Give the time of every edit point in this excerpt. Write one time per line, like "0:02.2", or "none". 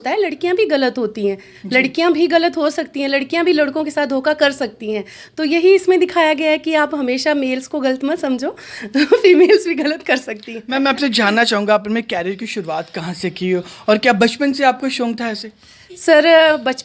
none